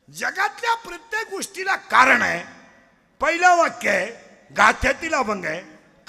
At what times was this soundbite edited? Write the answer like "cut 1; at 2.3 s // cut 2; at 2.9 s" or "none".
none